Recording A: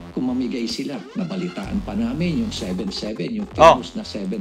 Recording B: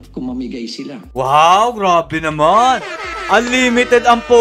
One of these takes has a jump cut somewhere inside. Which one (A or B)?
A